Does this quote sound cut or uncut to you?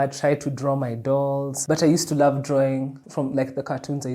cut